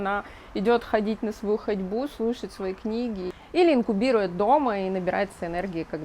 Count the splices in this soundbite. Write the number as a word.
one